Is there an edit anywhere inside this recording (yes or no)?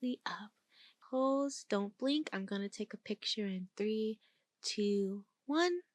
yes